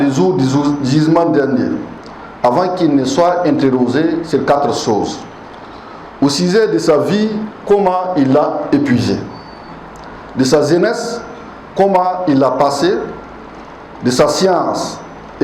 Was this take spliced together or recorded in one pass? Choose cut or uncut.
uncut